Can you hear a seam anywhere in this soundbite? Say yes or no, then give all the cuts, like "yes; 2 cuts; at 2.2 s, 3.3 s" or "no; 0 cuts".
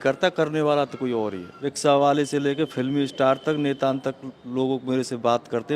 yes; 1 cut; at 1.5 s